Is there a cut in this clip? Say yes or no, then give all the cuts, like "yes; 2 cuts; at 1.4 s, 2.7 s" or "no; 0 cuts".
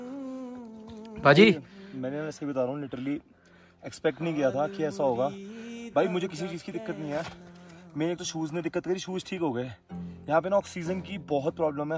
no; 0 cuts